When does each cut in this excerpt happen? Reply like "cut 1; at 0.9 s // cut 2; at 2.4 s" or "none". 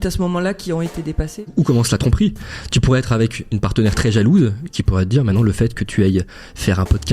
cut 1; at 1.5 s